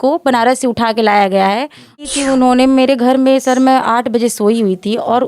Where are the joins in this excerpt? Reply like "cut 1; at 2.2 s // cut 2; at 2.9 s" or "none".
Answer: cut 1; at 2.0 s